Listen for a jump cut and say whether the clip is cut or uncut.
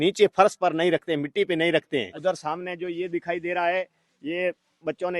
cut